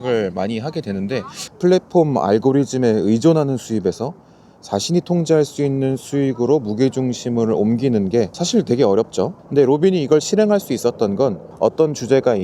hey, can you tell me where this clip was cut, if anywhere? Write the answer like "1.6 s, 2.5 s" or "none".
1.4 s, 8.4 s, 9.4 s, 11.5 s

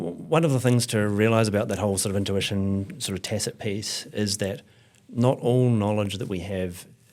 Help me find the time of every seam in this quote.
none

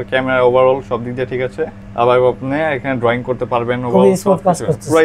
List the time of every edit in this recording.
none

